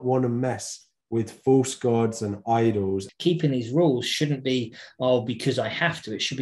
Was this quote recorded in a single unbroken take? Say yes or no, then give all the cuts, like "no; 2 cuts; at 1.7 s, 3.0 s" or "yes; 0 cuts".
no; 1 cut; at 3.1 s